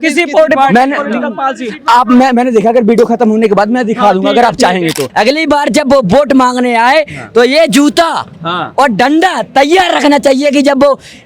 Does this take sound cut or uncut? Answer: cut